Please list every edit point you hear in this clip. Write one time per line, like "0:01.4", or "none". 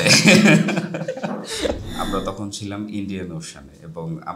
0:01.8